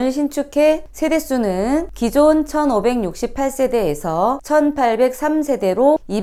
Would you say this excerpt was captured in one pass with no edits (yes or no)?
yes